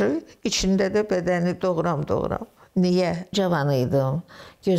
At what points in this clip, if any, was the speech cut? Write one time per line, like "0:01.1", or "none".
0:03.3